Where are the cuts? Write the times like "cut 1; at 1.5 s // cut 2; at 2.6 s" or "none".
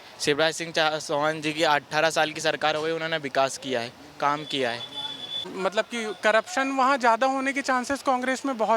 cut 1; at 5.5 s